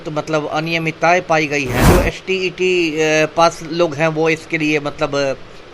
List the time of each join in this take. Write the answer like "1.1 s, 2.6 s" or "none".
1.8 s

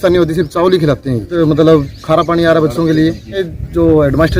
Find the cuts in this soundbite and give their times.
1.3 s, 3.5 s

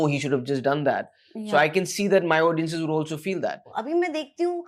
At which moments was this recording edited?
3.7 s

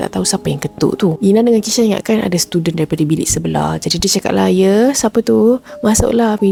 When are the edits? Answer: none

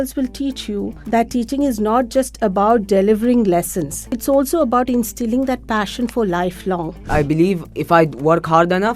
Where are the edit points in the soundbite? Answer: 1.0 s, 4.2 s, 7.0 s

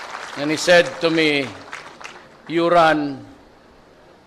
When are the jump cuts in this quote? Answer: 1.0 s

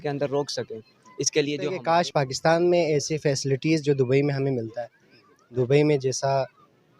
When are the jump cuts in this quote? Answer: 1.8 s

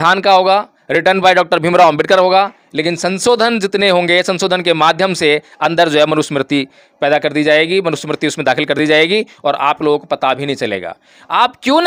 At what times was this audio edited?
none

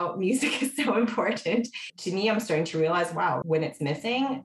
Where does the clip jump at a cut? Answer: 1.8 s

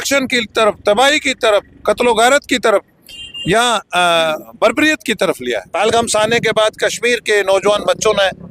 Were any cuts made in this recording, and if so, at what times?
5.6 s

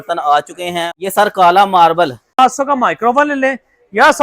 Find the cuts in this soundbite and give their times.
0.9 s, 2.4 s

